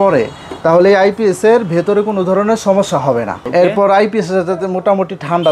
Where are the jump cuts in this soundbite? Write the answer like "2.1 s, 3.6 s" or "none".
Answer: 3.4 s